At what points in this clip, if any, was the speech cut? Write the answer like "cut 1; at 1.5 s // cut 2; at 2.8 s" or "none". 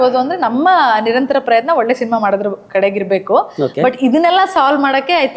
none

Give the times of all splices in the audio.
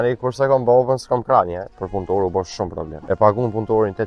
cut 1; at 1.8 s // cut 2; at 2.9 s

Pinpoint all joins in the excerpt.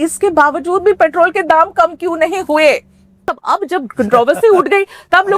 cut 1; at 3.3 s

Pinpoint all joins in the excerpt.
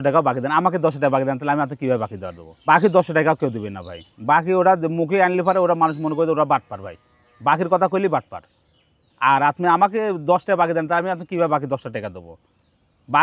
cut 1; at 2.7 s

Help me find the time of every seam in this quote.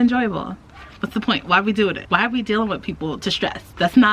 cut 1; at 2.0 s

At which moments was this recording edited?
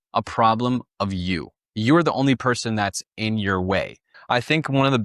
cut 1; at 1.1 s // cut 2; at 4.1 s

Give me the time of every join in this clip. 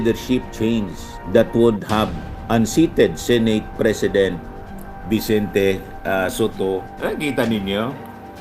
cut 1; at 6.9 s

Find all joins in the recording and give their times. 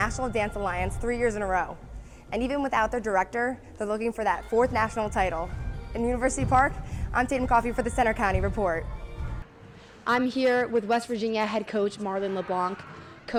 none

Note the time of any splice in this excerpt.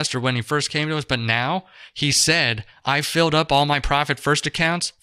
cut 1; at 1.8 s

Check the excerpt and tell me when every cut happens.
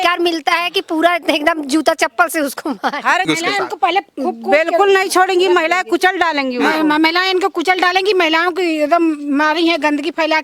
cut 1; at 3.2 s

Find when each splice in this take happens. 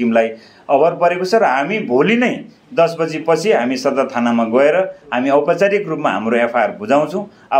none

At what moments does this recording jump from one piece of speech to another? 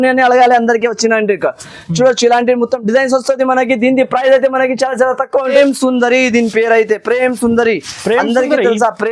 cut 1; at 5.5 s

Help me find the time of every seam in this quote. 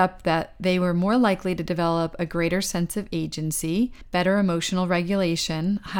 cut 1; at 4.0 s

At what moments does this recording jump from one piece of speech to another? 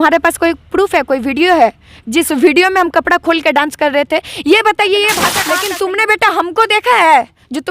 cut 1; at 5.3 s

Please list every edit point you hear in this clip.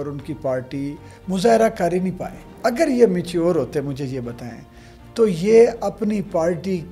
cut 1; at 2.5 s

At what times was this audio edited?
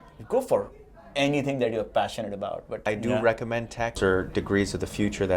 cut 1; at 2.9 s // cut 2; at 4.0 s

